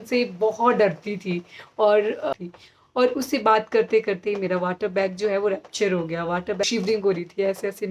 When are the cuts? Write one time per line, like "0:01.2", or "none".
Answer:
0:02.3
0:06.6